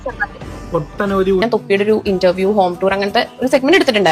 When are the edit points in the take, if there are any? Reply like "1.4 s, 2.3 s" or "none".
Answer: 1.4 s

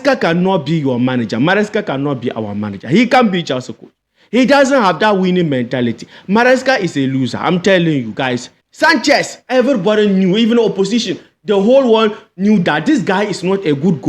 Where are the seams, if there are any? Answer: 8.5 s

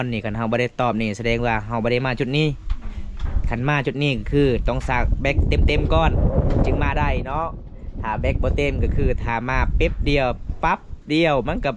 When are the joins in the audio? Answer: none

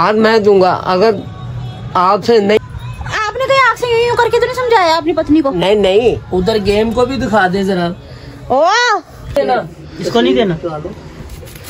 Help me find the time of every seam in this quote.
2.6 s, 4.8 s, 9.4 s

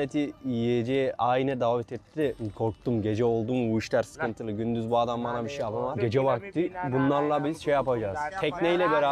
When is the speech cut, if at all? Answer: 2.4 s, 6.0 s, 8.3 s

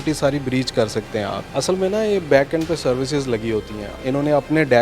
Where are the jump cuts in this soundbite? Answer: 1.4 s, 3.8 s

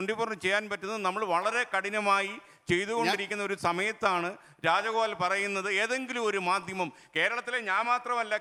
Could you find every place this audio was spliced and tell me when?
none

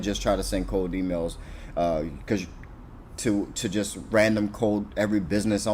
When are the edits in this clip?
none

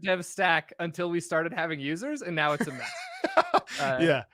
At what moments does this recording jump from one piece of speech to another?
none

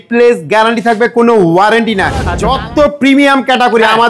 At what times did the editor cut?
2.3 s

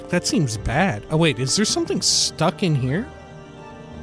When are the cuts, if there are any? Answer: 3.1 s

